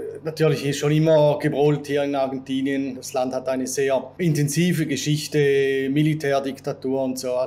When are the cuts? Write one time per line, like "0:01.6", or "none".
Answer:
0:03.0
0:04.1

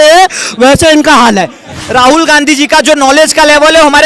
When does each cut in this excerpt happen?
0:01.8

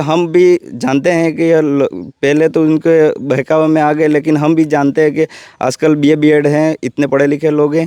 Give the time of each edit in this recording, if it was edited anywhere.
none

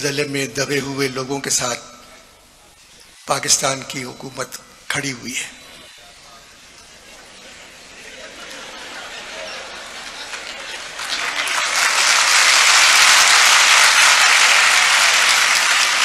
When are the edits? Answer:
none

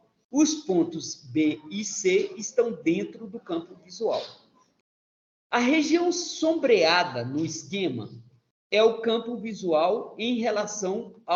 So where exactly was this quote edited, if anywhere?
none

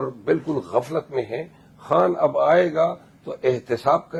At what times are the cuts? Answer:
none

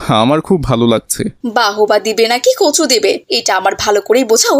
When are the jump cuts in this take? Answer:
0:01.4

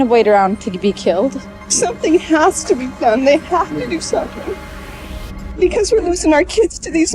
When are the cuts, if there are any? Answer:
0:01.6

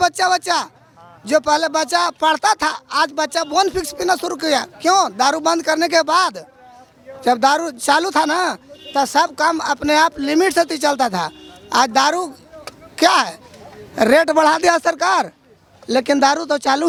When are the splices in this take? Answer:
none

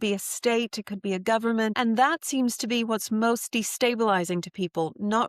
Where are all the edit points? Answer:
0:01.7

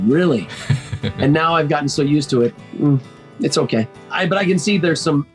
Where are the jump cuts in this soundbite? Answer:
0:04.1

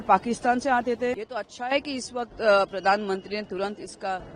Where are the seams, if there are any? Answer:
0:01.2

